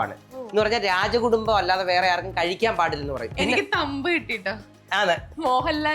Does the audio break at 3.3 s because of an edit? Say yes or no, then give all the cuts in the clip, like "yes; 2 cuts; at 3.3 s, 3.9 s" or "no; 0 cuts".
yes; 1 cut; at 3.3 s